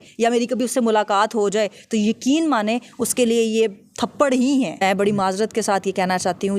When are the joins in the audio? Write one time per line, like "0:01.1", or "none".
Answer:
0:04.8